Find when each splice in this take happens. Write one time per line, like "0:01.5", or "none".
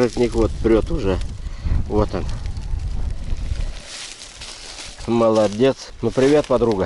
0:05.9